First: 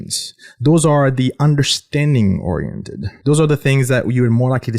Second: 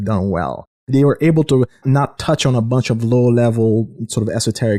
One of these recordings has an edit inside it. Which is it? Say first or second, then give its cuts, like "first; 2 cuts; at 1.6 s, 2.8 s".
first; 1 cut; at 3.1 s